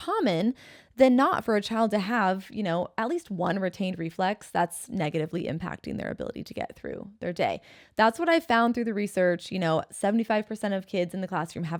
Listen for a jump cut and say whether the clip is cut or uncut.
uncut